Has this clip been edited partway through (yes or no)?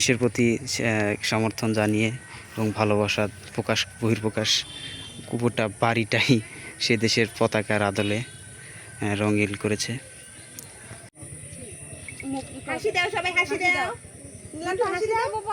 yes